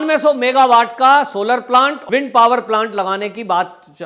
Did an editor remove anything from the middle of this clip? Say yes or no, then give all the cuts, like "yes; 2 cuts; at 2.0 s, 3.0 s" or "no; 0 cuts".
yes; 1 cut; at 2.0 s